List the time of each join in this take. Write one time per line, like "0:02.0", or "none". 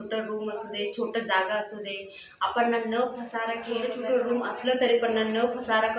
0:03.7